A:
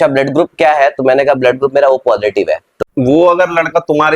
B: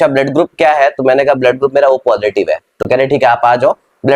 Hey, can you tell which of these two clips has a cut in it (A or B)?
A